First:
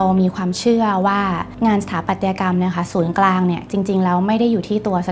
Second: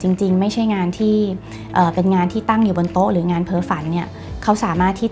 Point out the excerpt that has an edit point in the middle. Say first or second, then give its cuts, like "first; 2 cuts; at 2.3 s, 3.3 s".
first; 1 cut; at 1.5 s